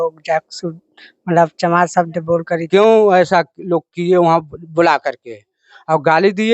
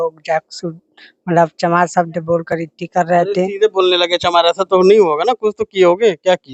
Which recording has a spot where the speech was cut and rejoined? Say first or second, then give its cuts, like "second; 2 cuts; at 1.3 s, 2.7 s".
first; 1 cut; at 2.5 s